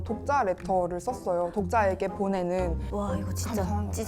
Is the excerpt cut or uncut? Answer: uncut